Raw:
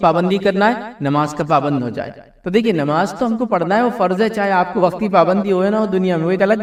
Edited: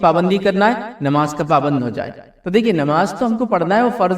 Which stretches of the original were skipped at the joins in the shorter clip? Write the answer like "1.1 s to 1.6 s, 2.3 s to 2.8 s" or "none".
none